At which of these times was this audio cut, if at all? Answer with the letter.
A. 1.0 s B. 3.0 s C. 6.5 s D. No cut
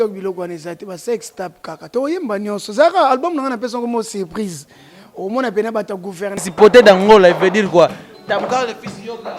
C